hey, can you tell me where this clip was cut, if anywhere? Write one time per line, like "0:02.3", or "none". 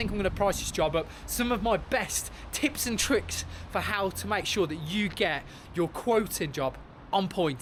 none